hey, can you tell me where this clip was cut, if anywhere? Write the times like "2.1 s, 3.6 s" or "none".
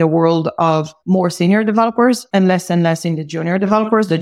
0.9 s, 2.2 s